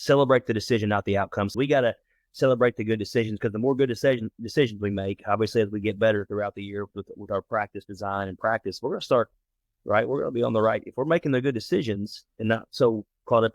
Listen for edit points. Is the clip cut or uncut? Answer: cut